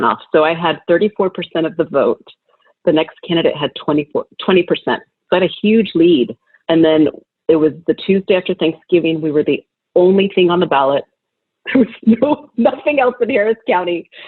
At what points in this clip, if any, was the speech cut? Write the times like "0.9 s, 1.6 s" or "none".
none